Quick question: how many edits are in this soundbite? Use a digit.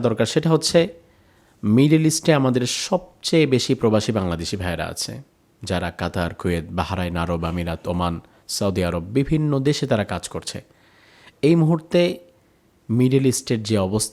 0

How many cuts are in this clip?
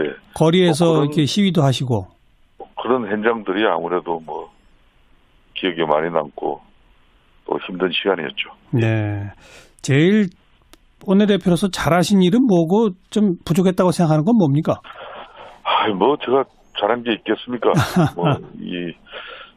1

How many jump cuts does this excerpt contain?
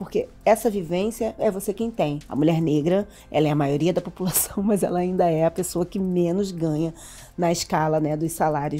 1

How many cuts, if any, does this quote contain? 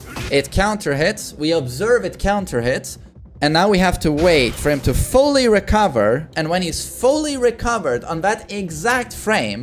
0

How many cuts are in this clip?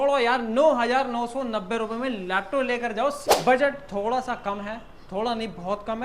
1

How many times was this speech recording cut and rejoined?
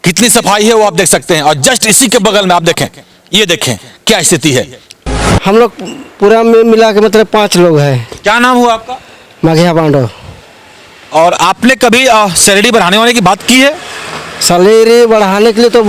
1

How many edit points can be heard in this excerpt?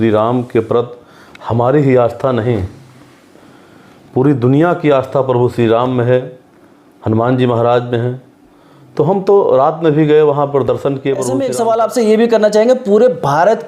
1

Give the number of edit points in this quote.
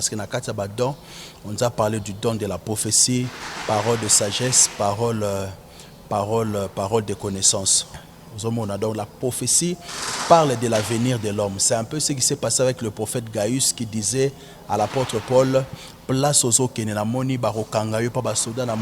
1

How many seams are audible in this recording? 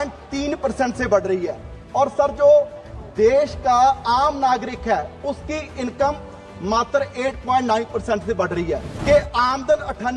1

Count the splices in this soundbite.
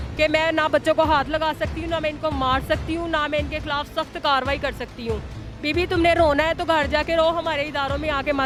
0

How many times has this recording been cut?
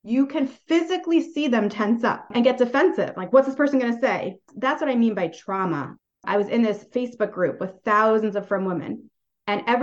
2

